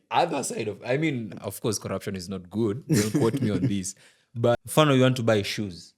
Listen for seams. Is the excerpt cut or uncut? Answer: cut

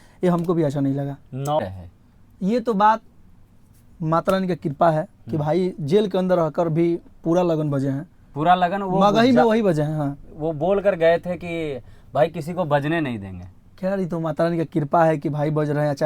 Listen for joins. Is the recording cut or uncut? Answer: cut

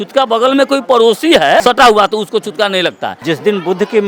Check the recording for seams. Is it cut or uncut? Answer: cut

